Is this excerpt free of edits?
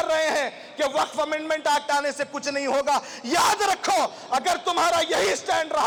yes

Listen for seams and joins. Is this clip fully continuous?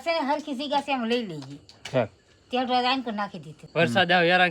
no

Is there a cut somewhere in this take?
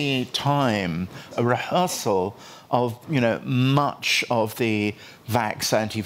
yes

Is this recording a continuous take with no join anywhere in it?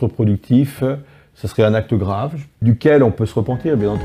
no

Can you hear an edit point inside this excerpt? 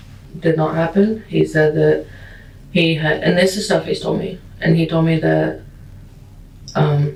no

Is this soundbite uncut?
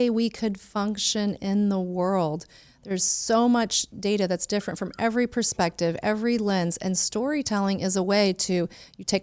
yes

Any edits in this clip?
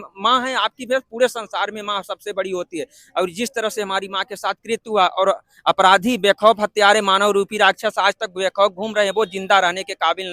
no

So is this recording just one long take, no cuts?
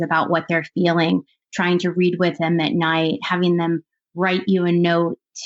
yes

